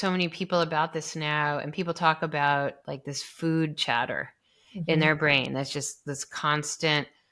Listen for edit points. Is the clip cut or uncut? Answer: uncut